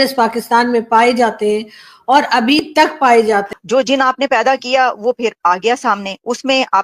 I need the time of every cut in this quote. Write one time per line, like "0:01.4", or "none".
0:03.5